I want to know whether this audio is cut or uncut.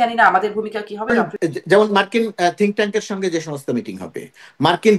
cut